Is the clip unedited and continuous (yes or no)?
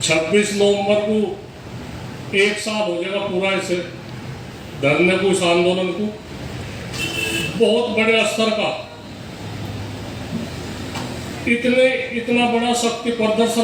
yes